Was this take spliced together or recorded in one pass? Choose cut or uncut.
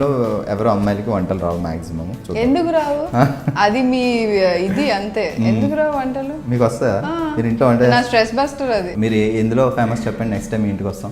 cut